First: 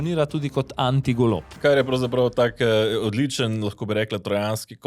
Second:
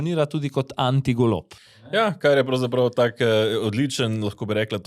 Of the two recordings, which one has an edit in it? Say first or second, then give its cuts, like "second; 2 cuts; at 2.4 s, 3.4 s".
first; 1 cut; at 1.6 s